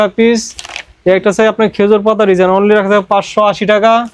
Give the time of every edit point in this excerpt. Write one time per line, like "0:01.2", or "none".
none